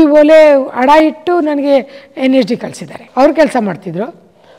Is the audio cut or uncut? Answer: cut